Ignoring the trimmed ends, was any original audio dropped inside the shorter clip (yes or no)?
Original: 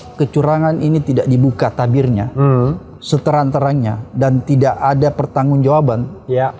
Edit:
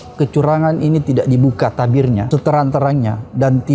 yes